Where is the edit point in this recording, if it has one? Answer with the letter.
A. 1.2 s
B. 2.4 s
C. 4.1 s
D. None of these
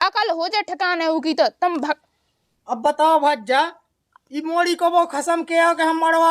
B